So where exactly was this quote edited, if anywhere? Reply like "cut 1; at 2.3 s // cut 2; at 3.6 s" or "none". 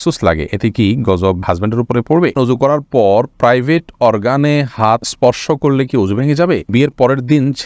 cut 1; at 2.3 s // cut 2; at 5.1 s // cut 3; at 6.7 s